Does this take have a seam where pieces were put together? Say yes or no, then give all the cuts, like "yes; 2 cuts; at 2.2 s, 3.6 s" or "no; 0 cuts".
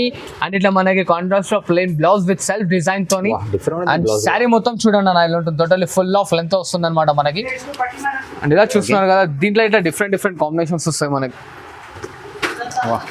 no; 0 cuts